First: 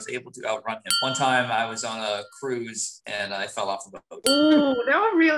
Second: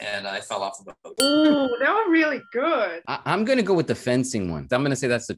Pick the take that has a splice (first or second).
first